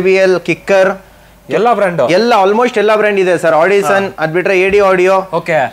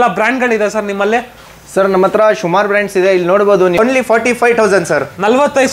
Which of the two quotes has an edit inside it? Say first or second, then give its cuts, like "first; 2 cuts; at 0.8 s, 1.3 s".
second; 1 cut; at 3.8 s